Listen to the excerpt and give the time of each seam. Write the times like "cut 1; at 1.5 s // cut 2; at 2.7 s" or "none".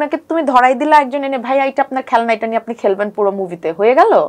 none